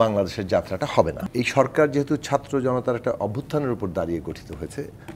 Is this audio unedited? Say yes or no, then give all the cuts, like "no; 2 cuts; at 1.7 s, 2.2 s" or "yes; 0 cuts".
no; 1 cut; at 1.2 s